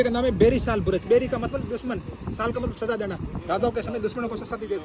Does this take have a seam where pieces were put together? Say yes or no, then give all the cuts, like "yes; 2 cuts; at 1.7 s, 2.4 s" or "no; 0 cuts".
no; 0 cuts